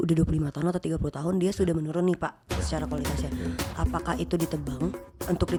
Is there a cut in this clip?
no; 0 cuts

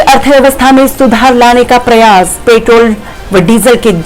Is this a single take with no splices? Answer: yes; 0 cuts

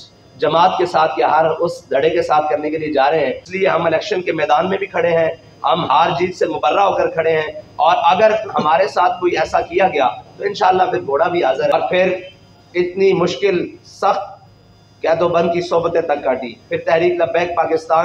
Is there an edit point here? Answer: yes; 2 cuts; at 3.4 s, 11.7 s

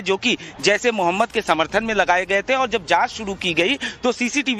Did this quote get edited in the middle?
no; 0 cuts

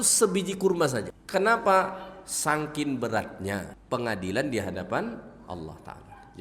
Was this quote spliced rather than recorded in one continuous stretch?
yes; 2 cuts; at 1.2 s, 3.7 s

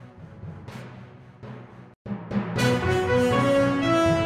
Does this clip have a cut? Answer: no; 0 cuts

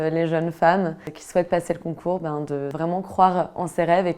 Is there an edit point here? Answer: yes; 2 cuts; at 1.0 s, 2.7 s

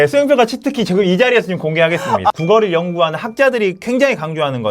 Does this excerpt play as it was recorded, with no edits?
no; 1 cut; at 2.3 s

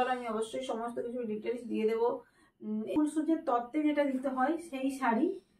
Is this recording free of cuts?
no; 1 cut; at 2.9 s

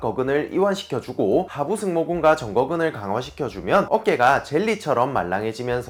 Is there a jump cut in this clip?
no; 0 cuts

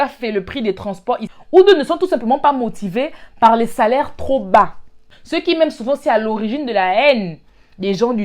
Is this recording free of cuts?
no; 2 cuts; at 1.3 s, 5.0 s

